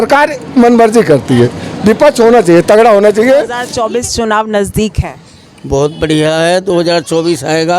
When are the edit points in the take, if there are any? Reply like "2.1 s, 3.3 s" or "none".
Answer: 3.6 s

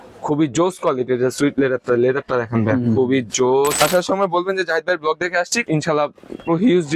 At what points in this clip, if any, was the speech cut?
3.8 s, 5.6 s

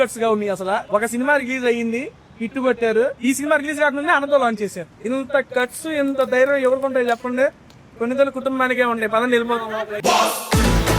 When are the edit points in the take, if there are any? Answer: 0.8 s, 3.2 s, 4.9 s

